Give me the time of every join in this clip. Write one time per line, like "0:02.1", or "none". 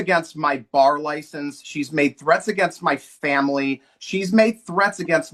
none